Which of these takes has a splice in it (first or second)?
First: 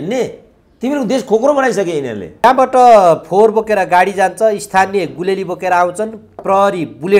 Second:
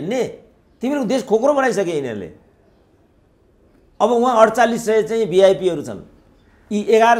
first